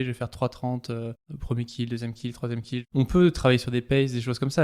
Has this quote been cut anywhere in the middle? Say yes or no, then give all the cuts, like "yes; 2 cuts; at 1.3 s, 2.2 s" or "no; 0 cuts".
yes; 2 cuts; at 1.3 s, 2.9 s